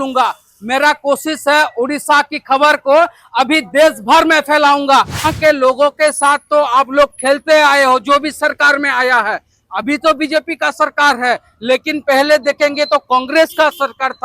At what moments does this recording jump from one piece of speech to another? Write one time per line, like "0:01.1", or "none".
0:05.3